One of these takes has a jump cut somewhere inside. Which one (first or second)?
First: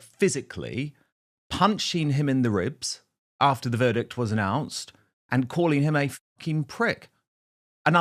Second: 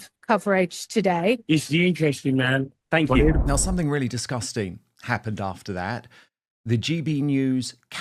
second